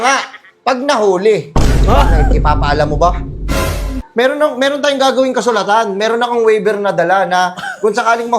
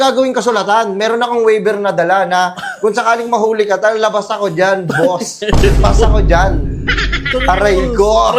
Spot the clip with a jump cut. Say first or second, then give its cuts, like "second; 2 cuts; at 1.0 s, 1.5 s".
first; 1 cut; at 4.0 s